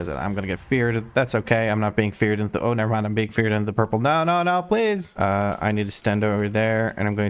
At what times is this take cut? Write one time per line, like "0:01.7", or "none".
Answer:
0:05.1